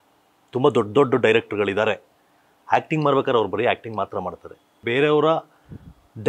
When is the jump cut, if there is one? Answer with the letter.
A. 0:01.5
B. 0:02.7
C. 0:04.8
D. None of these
C